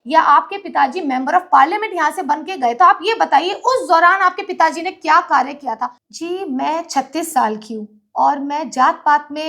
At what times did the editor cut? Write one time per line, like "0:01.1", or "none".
0:06.0